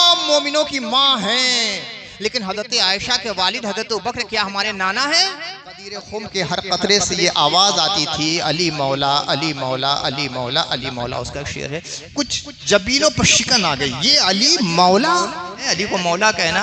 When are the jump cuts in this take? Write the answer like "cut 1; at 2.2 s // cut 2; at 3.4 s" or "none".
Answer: cut 1; at 6.1 s // cut 2; at 15.7 s